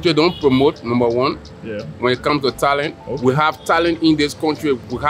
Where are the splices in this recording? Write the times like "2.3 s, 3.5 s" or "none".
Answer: none